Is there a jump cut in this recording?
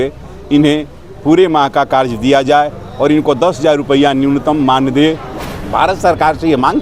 yes; 1 cut; at 5.3 s

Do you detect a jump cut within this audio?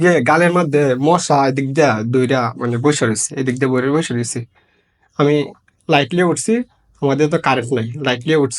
no; 0 cuts

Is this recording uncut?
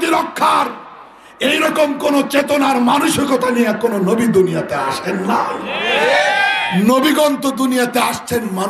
yes; 0 cuts

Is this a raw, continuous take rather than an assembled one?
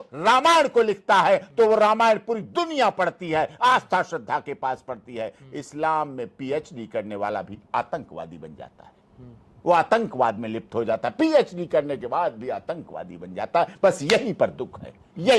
yes; 0 cuts

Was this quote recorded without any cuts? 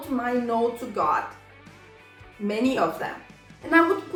yes; 0 cuts

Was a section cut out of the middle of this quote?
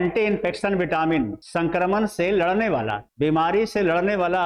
no; 0 cuts

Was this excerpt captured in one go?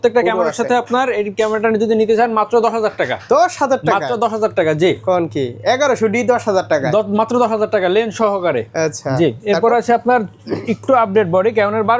yes; 0 cuts

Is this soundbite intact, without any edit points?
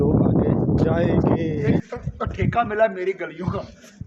no; 1 cut; at 1.8 s

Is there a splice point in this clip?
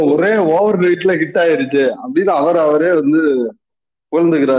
no; 0 cuts

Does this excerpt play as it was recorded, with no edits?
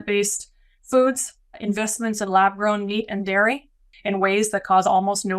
no; 2 cuts; at 1.6 s, 3.9 s

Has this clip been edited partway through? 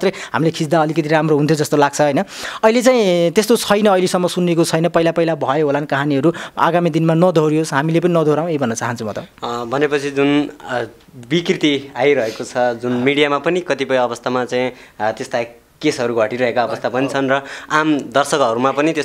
no; 0 cuts

